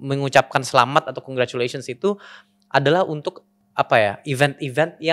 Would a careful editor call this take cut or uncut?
cut